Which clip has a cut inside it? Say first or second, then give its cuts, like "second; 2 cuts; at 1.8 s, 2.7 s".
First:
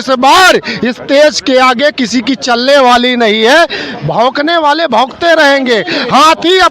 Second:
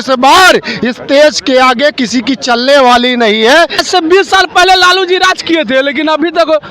second; 1 cut; at 3.8 s